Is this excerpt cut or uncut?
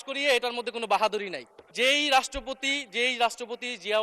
cut